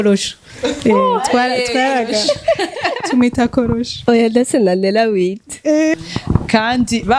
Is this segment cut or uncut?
cut